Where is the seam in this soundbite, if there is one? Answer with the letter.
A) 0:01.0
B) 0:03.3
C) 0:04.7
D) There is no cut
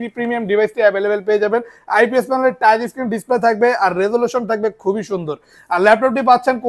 D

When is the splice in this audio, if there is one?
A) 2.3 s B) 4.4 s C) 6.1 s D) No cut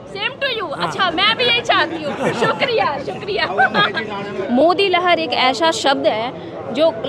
B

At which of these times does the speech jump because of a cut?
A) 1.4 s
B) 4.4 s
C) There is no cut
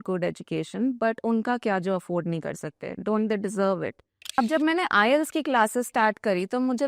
B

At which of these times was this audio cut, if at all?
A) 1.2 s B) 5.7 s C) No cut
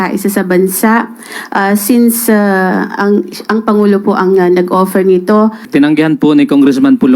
B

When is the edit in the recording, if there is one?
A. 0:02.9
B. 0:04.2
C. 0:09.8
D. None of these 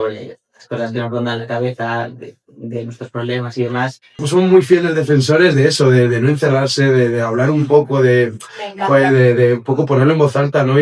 B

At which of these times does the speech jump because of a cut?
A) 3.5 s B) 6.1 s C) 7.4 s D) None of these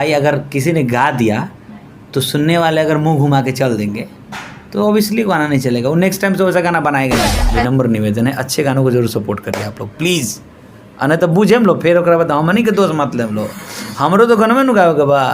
C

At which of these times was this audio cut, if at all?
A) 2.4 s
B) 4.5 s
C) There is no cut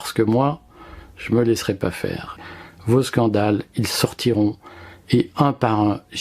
A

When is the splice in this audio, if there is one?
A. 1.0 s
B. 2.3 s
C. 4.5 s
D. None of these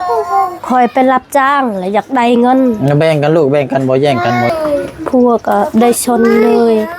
C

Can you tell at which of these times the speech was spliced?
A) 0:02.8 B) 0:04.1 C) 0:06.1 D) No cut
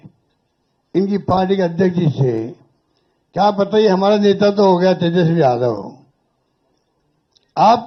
D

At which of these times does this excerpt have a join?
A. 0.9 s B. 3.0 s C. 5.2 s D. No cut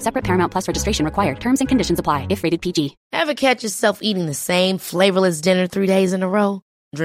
B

